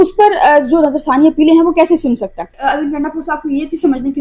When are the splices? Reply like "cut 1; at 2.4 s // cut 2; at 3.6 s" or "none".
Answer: cut 1; at 2.6 s